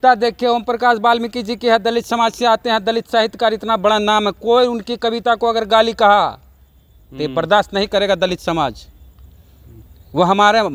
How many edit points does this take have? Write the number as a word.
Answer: zero